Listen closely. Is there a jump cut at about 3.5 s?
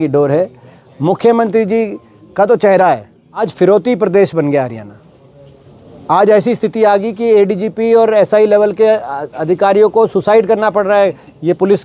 yes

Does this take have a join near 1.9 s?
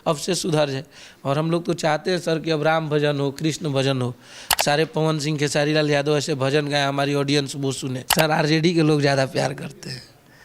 no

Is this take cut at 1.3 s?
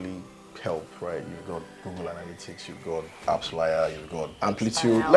no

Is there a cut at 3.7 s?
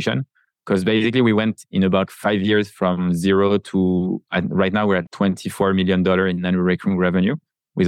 no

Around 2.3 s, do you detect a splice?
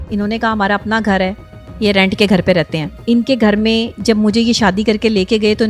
no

